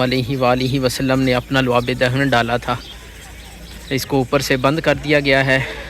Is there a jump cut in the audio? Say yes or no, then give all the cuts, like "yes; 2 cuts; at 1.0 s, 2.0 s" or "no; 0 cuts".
no; 0 cuts